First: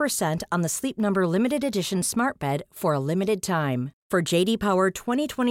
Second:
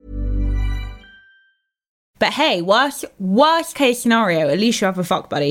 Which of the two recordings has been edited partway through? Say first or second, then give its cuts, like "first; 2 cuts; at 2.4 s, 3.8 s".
second; 1 cut; at 2.0 s